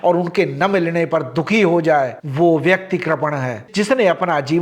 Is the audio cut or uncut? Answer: cut